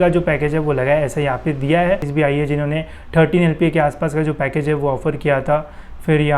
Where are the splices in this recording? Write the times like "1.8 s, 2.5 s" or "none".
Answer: 2.1 s